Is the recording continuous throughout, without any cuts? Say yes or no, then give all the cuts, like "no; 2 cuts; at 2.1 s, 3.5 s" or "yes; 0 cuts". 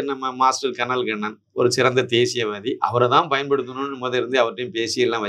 yes; 0 cuts